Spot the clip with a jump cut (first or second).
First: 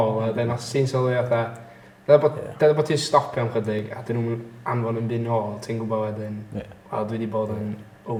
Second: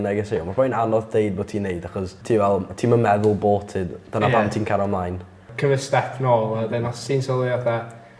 second